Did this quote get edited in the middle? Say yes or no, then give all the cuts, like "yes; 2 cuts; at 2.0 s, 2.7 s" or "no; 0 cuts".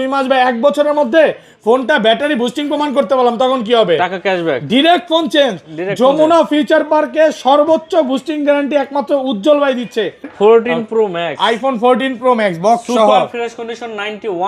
yes; 1 cut; at 10.3 s